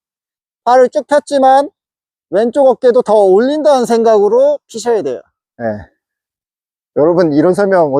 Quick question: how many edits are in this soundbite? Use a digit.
1